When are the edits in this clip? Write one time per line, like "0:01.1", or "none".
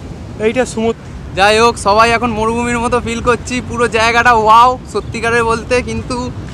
0:01.0

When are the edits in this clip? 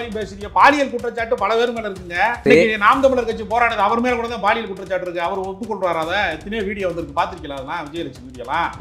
0:02.4

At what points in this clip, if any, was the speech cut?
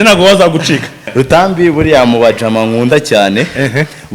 0:01.0

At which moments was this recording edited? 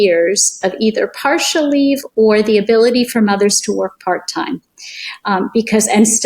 none

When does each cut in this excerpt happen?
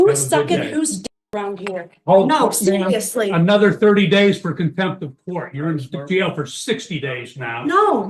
none

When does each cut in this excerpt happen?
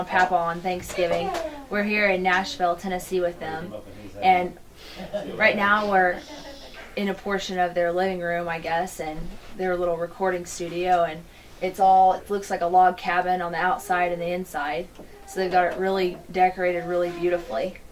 none

